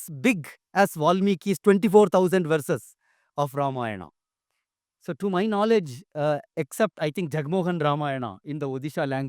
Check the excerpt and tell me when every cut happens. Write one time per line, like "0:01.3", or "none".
none